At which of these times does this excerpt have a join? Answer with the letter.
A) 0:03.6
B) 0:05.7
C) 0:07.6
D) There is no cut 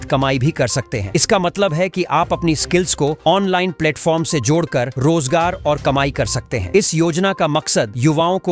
D